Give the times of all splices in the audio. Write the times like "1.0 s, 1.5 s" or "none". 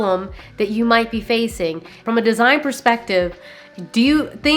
2.0 s